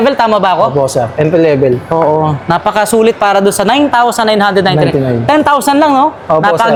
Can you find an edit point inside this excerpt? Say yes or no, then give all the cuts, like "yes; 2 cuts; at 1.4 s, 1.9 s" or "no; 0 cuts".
no; 0 cuts